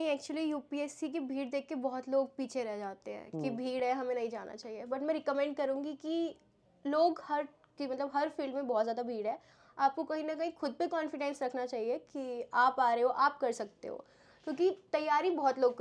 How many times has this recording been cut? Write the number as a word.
zero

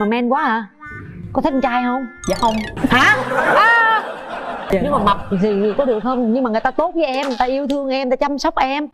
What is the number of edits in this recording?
two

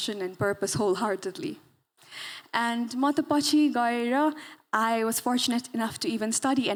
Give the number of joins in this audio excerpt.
zero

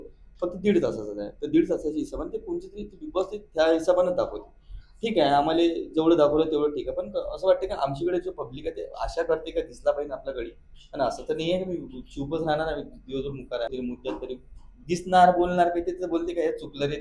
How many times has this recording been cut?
one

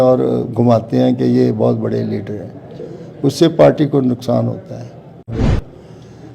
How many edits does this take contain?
one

